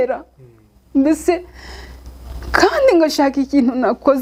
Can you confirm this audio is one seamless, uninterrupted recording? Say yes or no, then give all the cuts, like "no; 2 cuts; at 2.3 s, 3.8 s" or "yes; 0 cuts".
yes; 0 cuts